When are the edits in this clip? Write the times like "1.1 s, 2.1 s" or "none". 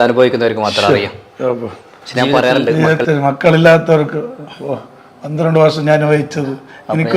2.7 s